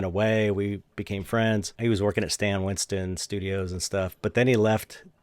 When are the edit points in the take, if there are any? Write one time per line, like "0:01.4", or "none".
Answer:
0:01.7